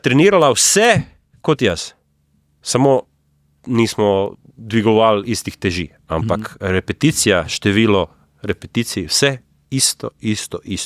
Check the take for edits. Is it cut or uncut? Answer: uncut